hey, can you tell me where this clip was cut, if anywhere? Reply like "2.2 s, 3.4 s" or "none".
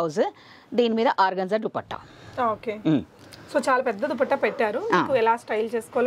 none